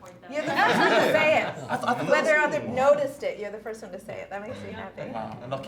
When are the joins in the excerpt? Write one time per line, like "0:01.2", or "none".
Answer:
none